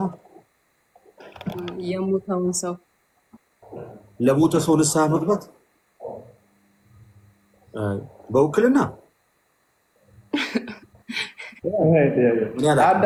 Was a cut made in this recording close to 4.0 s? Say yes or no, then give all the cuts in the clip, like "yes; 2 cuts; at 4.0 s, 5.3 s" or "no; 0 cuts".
no; 0 cuts